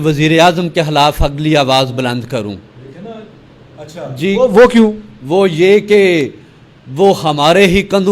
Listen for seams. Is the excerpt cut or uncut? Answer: uncut